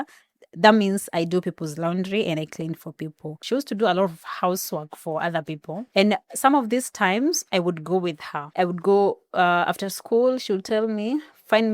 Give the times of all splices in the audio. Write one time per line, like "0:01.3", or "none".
0:03.3
0:05.8
0:08.3